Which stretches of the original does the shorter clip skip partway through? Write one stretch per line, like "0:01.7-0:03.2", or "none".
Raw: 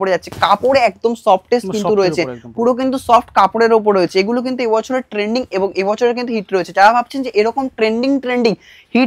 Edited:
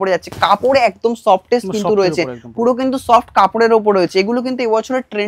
none

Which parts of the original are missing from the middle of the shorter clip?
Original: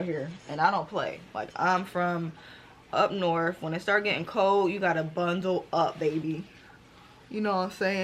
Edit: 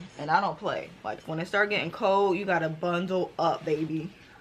0:01.5-0:03.6

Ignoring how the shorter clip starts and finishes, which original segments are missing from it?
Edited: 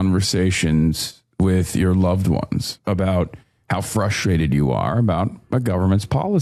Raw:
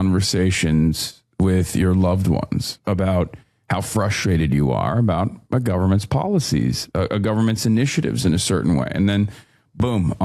none

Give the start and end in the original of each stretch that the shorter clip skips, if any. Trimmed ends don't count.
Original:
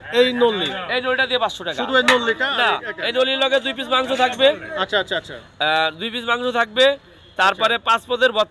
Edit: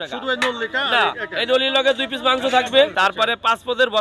0:04.6-0:07.3

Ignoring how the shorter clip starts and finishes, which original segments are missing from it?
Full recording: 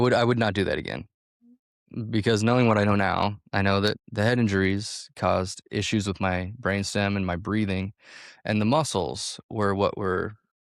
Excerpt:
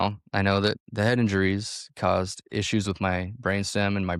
none

